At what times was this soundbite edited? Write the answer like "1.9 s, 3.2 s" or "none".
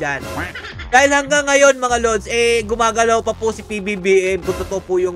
none